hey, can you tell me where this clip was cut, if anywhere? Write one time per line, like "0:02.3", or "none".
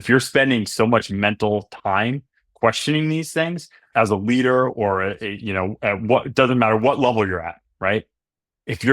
0:03.9